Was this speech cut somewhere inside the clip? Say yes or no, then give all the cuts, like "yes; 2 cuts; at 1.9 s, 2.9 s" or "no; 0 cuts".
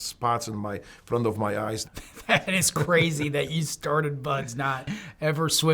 yes; 1 cut; at 1.8 s